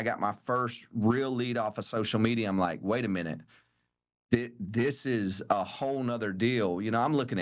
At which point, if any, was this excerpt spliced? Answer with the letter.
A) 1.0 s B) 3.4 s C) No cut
C